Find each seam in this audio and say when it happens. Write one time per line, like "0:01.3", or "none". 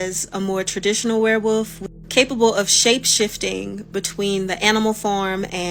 none